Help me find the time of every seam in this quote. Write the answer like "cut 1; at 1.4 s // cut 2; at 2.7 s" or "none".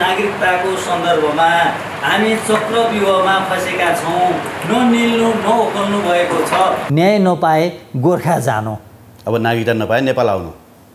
cut 1; at 6.8 s